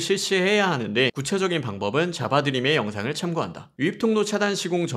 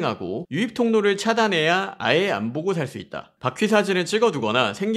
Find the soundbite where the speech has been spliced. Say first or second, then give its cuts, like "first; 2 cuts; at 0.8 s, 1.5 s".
first; 2 cuts; at 1.2 s, 3.7 s